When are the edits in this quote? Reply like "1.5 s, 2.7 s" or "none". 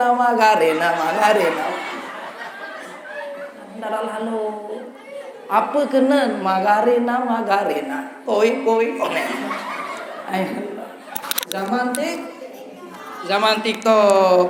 none